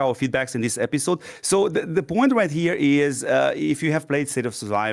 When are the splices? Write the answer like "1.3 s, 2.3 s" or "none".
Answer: 1.3 s